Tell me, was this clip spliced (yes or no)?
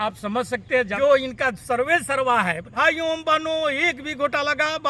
yes